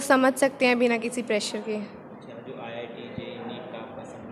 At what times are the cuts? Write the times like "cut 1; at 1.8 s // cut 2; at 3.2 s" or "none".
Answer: none